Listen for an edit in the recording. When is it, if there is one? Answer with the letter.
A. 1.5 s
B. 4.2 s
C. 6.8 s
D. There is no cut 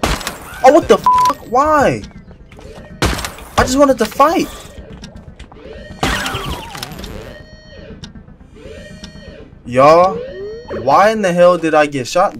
D